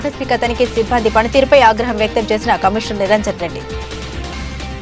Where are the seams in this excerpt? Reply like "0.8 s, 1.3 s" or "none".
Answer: none